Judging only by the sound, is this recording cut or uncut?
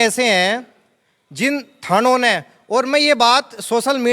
uncut